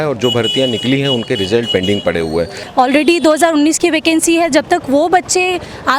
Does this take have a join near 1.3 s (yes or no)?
no